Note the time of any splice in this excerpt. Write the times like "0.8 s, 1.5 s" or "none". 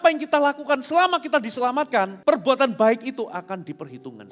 2.1 s